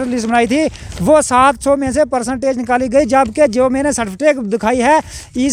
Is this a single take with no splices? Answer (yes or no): yes